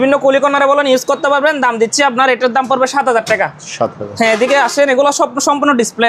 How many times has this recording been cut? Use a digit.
0